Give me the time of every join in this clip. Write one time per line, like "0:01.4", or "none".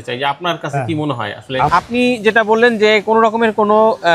0:01.7